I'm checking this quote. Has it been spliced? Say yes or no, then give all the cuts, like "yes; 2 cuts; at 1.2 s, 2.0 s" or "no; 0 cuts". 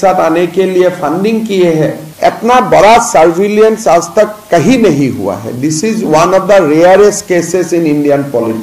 yes; 1 cut; at 2.1 s